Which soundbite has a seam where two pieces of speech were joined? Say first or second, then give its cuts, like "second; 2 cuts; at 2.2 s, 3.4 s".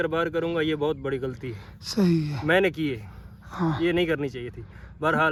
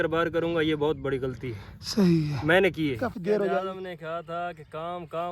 second; 1 cut; at 3.0 s